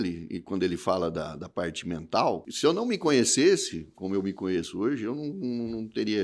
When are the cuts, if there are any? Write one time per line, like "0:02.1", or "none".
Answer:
0:02.5